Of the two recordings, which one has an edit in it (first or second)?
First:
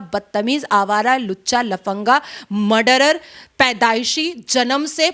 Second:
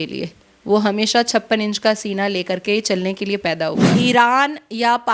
second